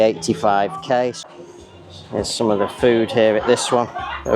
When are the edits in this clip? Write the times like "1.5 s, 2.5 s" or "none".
1.2 s